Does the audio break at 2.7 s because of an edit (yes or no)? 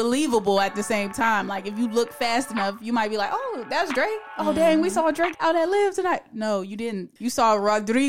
no